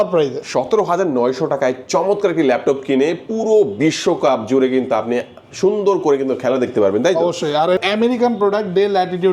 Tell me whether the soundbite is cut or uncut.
cut